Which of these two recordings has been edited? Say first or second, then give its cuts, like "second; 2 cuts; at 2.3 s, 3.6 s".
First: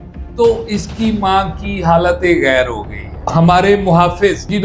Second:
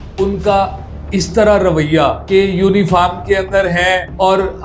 first; 1 cut; at 3.2 s